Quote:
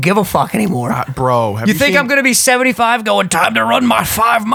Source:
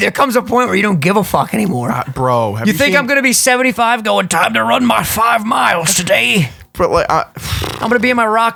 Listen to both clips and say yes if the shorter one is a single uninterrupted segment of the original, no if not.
yes